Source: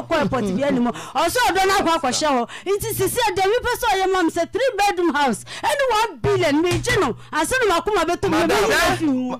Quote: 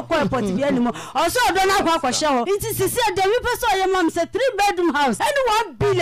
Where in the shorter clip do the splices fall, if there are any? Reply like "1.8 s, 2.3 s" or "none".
2.4 s, 5.2 s